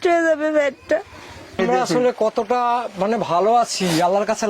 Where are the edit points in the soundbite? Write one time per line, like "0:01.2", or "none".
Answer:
0:01.6